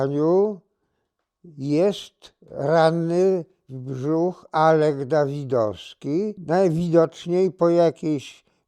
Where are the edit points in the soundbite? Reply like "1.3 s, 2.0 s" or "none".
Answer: 6.4 s